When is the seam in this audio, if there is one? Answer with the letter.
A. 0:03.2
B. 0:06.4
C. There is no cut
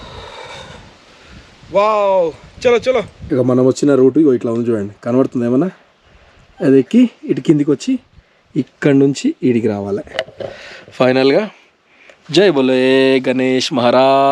A